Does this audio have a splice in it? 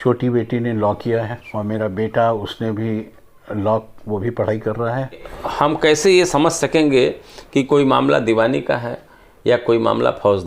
yes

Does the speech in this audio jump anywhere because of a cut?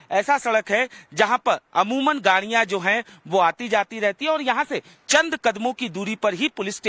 no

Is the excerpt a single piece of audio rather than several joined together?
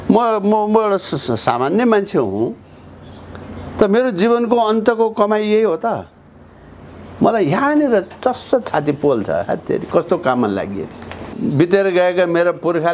no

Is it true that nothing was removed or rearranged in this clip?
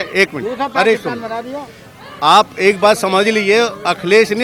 yes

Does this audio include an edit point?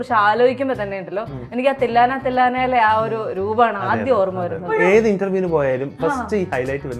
yes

